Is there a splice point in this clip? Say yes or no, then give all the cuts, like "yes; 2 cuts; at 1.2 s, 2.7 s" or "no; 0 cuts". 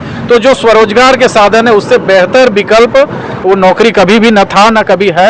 no; 0 cuts